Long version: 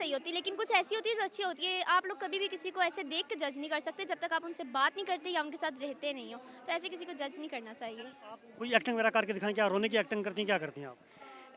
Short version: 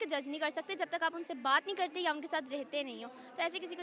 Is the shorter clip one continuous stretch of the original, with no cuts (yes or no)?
yes